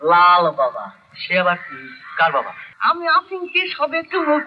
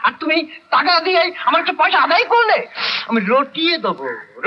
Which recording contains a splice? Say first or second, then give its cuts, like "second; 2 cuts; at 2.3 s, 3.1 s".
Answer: first; 1 cut; at 2.6 s